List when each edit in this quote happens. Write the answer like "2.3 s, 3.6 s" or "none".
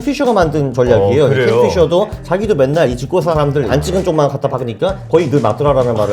3.7 s

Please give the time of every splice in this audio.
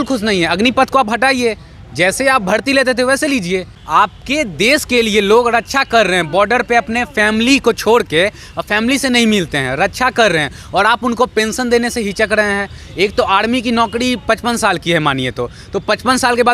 3.8 s

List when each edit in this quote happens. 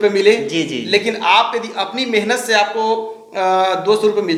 none

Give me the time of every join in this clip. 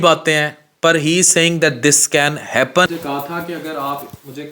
2.9 s

